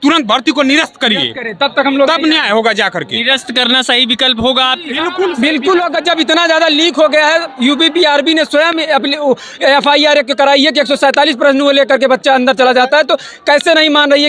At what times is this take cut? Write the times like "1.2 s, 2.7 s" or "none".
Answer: none